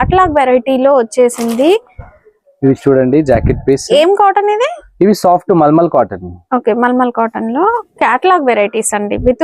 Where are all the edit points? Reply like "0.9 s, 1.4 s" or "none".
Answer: none